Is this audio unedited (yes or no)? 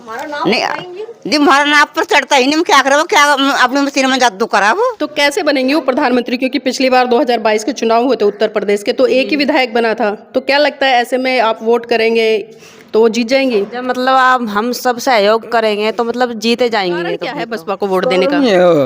no